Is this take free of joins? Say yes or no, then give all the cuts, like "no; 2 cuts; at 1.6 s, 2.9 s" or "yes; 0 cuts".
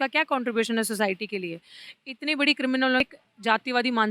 no; 1 cut; at 3.0 s